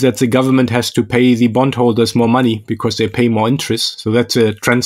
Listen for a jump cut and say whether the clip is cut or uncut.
uncut